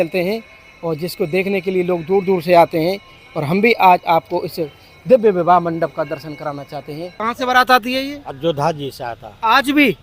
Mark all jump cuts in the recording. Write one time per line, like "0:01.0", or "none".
0:07.2